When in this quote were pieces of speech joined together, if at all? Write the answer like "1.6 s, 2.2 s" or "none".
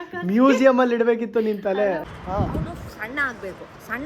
2.1 s